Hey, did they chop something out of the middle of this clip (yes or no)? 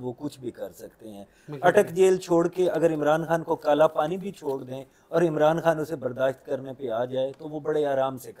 no